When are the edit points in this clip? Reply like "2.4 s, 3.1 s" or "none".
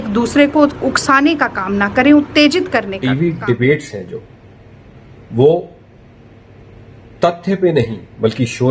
2.9 s

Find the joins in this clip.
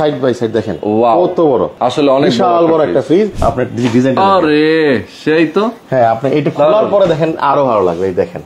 1.7 s, 3.3 s

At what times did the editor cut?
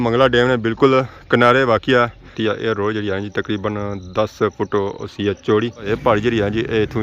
2.3 s, 5.9 s

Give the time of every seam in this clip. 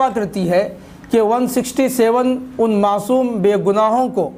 none

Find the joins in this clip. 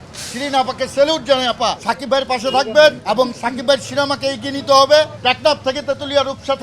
1.9 s, 3.0 s, 5.1 s

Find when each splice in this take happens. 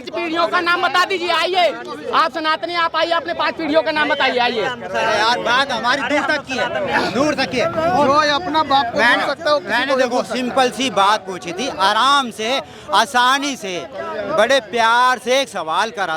none

